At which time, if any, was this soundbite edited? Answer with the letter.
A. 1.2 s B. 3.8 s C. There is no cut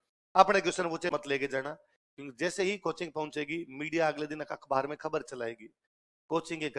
A